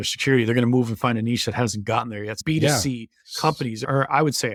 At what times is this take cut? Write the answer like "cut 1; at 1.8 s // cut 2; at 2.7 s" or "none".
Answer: none

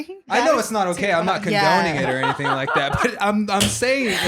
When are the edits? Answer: none

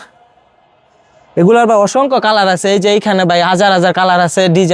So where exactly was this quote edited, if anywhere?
none

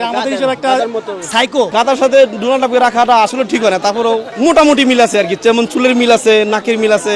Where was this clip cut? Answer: cut 1; at 1.7 s // cut 2; at 4.3 s

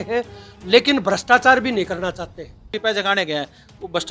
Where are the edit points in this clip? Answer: cut 1; at 2.7 s

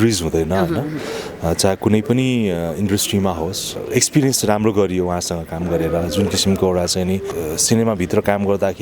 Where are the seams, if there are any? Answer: cut 1; at 3.7 s // cut 2; at 7.3 s

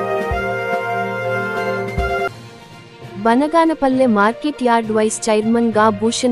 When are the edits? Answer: cut 1; at 2.3 s

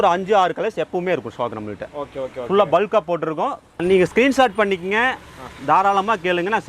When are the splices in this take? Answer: cut 1; at 3.8 s

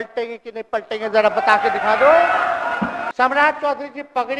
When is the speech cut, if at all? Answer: cut 1; at 3.1 s

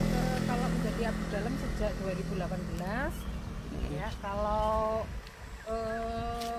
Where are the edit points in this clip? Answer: none

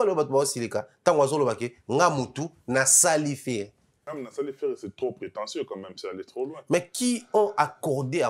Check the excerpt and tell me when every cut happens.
cut 1; at 4.2 s

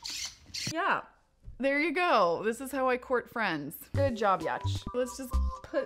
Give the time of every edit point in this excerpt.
cut 1; at 2.3 s

